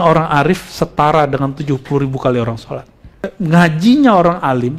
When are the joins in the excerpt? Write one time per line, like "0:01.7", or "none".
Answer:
0:03.3